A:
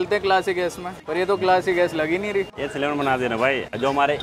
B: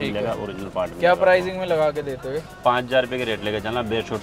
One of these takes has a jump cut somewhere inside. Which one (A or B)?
A